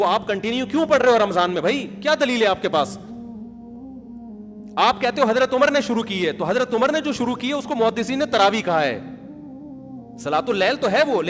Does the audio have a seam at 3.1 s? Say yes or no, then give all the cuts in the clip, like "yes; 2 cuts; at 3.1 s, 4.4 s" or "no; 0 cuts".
no; 0 cuts